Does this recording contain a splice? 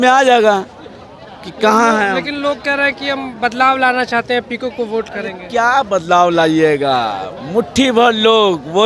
no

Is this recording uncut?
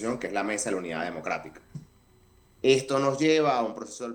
yes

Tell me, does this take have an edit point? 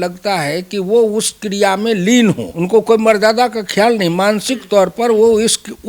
yes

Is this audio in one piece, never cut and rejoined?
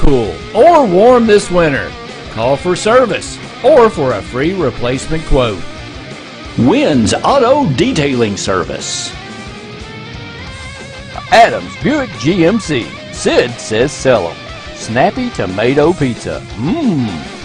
yes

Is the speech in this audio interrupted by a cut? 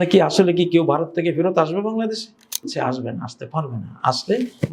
yes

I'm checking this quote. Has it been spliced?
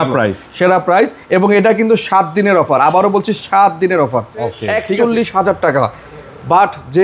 yes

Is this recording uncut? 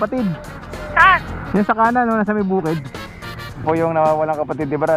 no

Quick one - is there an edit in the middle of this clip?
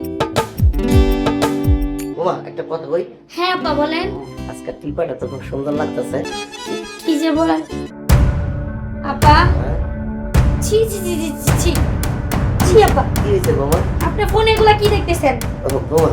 yes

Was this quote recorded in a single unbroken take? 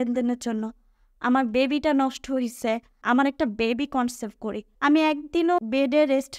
no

